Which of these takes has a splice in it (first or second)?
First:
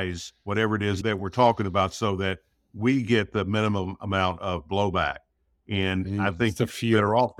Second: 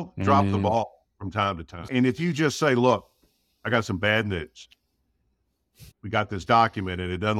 second